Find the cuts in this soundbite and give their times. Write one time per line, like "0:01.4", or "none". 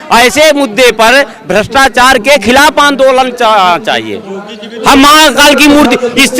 0:04.8